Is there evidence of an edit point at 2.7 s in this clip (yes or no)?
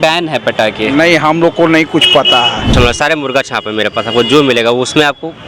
yes